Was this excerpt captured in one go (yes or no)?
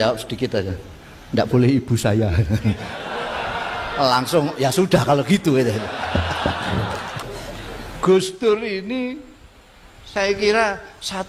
no